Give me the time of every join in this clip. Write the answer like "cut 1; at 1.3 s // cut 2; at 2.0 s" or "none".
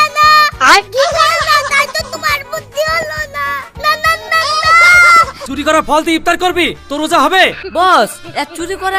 cut 1; at 5.4 s // cut 2; at 7.6 s